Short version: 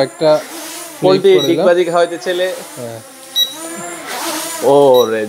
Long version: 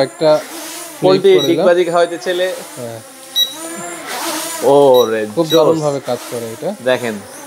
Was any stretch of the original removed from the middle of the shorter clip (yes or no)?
no